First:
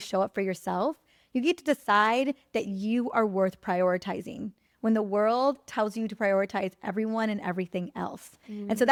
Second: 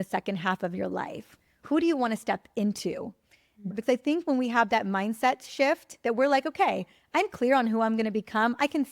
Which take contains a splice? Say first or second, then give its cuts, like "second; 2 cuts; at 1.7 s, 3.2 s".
second; 1 cut; at 3.7 s